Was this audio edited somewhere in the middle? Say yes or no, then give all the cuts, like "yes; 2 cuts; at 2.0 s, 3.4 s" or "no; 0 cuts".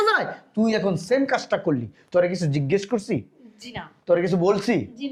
no; 0 cuts